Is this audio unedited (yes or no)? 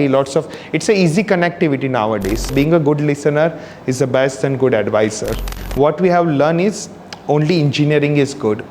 no